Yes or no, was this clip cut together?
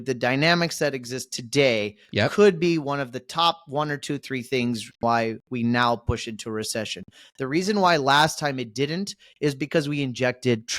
yes